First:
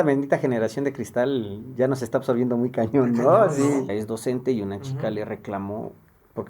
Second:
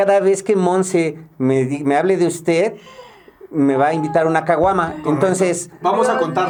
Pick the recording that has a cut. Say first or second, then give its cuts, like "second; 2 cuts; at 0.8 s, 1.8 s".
first; 1 cut; at 4.0 s